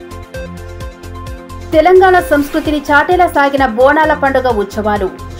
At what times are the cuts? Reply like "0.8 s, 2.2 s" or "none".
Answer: 1.6 s